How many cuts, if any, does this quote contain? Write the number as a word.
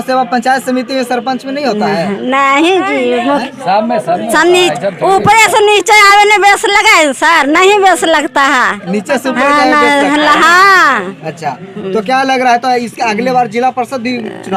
zero